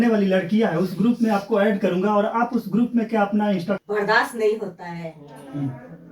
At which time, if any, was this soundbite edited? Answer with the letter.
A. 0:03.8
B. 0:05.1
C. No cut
A